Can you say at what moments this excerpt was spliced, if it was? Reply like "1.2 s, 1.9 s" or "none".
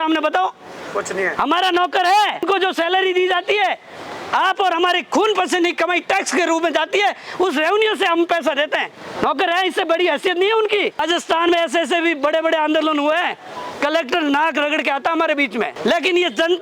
2.4 s, 9.0 s, 11.0 s, 15.7 s